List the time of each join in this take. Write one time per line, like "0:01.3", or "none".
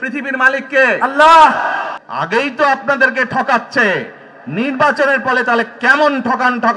0:01.9